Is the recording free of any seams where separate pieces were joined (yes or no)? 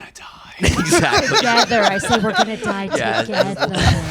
yes